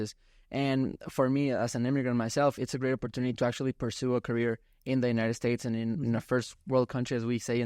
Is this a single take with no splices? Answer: yes; 0 cuts

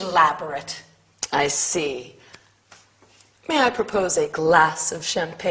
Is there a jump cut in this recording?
yes; 1 cut; at 1.6 s

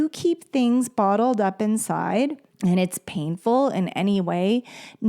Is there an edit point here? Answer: yes; 1 cut; at 2.5 s

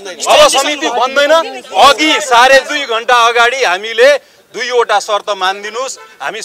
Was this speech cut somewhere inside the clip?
no; 0 cuts

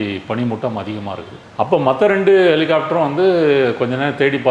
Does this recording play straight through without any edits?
yes; 0 cuts

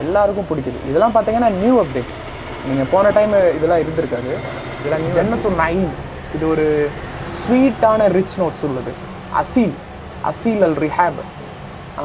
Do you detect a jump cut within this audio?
yes; 1 cut; at 5.1 s

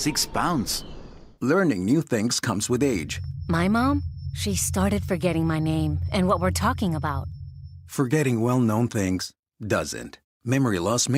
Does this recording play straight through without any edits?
yes; 0 cuts

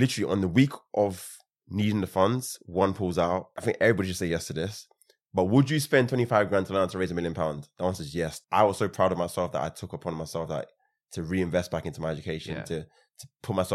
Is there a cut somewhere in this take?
yes; 2 cuts; at 3.6 s, 8.4 s

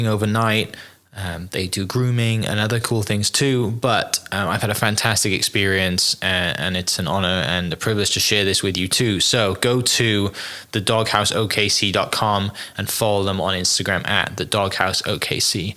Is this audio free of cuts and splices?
yes; 0 cuts

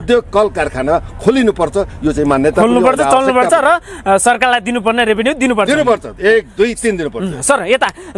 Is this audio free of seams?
yes; 0 cuts

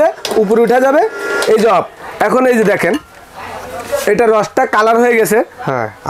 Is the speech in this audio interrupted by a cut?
no; 0 cuts

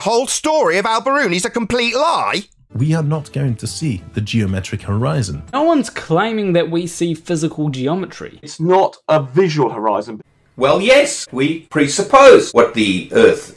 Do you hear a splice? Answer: yes; 6 cuts; at 2.8 s, 5.5 s, 8.5 s, 10.2 s, 11.4 s, 12.5 s

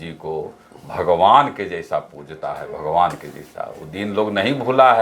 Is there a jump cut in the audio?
no; 0 cuts

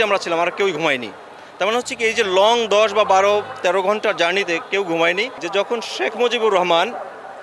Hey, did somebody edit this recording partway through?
yes; 1 cut; at 5.4 s

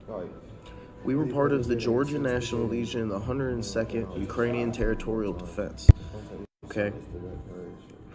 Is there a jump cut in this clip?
no; 0 cuts

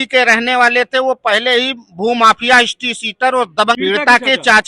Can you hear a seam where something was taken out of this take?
yes; 1 cut; at 3.8 s

